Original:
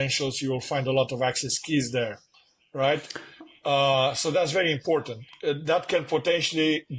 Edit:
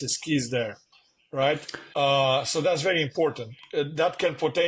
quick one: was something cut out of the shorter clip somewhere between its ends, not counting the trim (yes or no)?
yes